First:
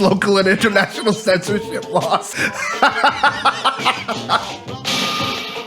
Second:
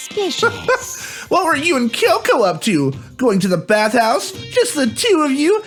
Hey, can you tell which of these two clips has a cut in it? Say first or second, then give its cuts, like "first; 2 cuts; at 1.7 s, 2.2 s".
first; 1 cut; at 2.3 s